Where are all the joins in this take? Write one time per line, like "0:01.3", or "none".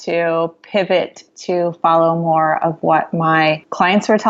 none